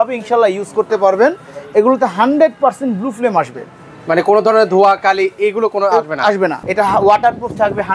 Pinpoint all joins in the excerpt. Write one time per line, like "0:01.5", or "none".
0:06.6